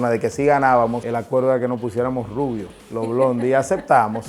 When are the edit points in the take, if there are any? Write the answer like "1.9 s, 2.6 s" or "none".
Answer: 1.0 s, 2.8 s